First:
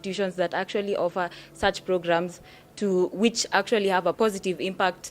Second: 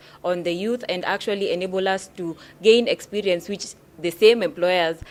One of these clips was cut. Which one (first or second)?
first